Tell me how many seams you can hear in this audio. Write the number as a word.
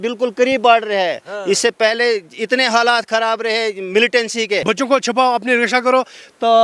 one